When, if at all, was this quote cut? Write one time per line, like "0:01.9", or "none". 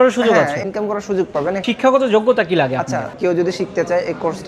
0:01.6
0:03.1